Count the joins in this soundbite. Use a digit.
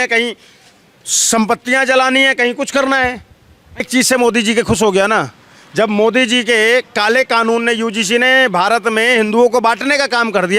1